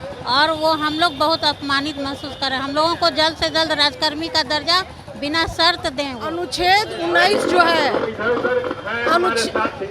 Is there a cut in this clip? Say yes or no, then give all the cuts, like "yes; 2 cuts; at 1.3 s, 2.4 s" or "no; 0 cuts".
yes; 1 cut; at 6.3 s